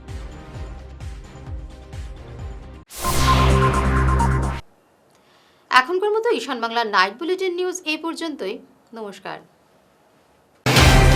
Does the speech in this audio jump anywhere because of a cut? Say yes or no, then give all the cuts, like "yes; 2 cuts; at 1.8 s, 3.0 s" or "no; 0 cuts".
no; 0 cuts